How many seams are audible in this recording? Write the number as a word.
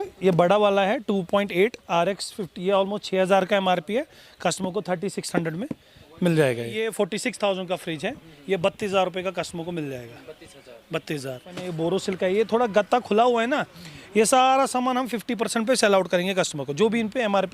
two